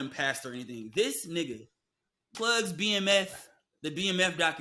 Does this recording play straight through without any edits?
no; 1 cut; at 2.3 s

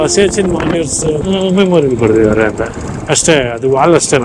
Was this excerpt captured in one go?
no; 2 cuts; at 1.2 s, 2.9 s

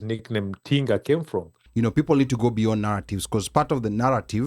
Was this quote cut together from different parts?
yes; 1 cut; at 1.6 s

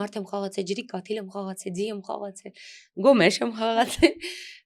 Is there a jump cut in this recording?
no; 0 cuts

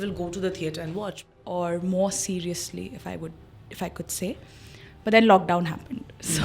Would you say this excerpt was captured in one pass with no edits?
no; 1 cut; at 1.4 s

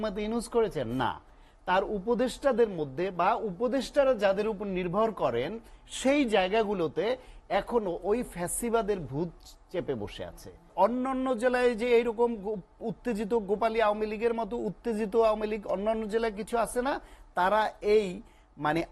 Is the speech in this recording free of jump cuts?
no; 1 cut; at 10.7 s

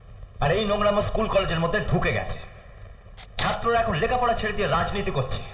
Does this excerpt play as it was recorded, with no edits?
yes; 0 cuts

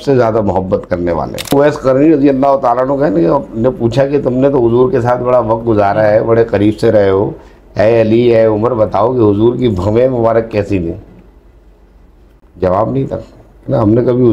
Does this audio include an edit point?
yes; 2 cuts; at 1.5 s, 12.6 s

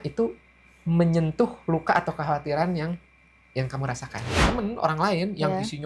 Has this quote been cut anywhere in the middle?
yes; 1 cut; at 4.3 s

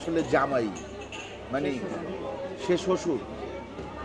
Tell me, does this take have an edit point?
no; 0 cuts

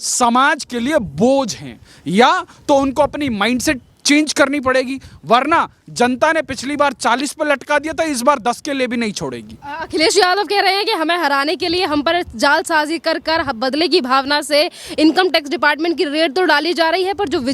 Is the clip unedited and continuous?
yes; 0 cuts

